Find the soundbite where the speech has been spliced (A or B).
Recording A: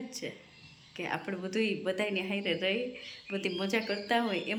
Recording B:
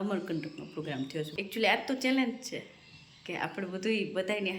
B